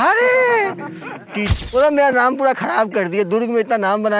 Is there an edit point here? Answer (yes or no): yes